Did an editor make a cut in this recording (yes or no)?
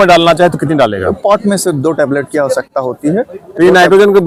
no